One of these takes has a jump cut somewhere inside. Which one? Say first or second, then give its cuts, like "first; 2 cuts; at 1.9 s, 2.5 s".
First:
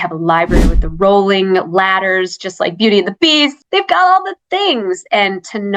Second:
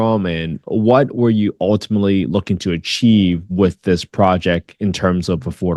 first; 1 cut; at 3.6 s